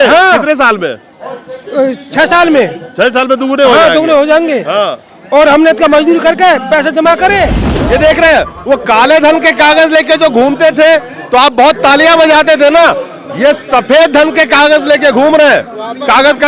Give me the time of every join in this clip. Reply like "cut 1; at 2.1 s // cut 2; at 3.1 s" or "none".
cut 1; at 7.7 s